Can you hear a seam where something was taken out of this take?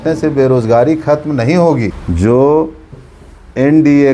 yes; 1 cut; at 1.9 s

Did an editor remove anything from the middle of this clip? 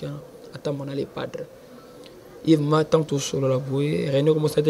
no; 0 cuts

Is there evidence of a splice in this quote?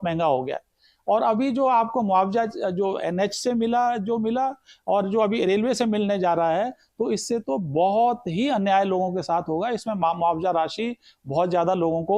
no; 0 cuts

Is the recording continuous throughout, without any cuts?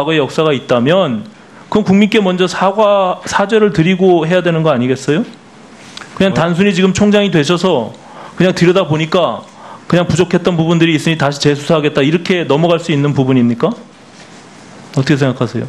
yes; 0 cuts

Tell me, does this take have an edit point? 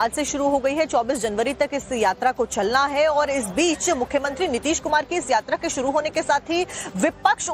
yes; 1 cut; at 2.3 s

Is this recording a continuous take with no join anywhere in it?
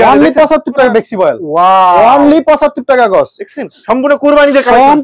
no; 2 cuts; at 0.9 s, 3.7 s

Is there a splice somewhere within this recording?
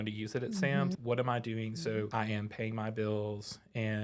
yes; 2 cuts; at 0.9 s, 2.1 s

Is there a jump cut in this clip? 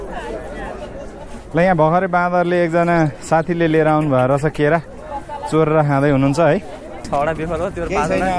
yes; 1 cut; at 7.1 s

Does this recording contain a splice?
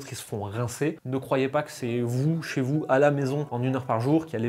no; 0 cuts

